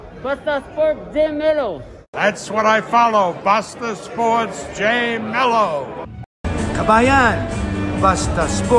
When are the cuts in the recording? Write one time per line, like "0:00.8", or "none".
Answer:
none